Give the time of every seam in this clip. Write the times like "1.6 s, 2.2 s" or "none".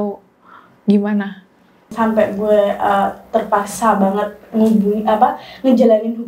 1.9 s